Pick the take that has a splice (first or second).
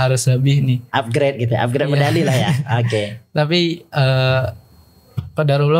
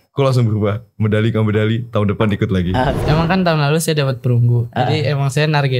second